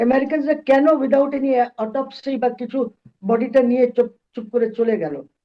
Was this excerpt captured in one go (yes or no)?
yes